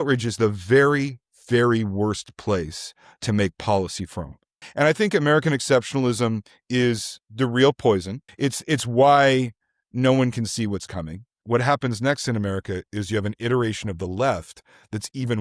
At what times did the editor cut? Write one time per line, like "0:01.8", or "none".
0:04.7
0:08.2
0:11.3

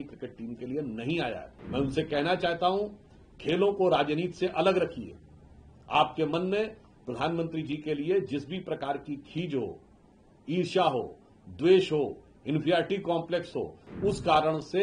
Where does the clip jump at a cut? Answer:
0:01.5

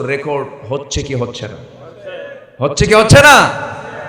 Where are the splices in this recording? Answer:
none

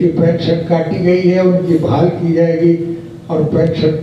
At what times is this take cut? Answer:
none

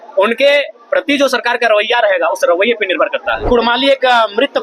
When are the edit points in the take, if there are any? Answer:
0:03.4

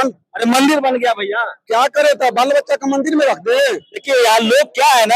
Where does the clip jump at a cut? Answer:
0:03.9

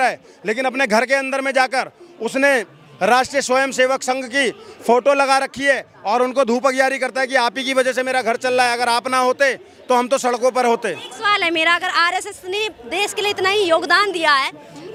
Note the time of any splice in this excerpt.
none

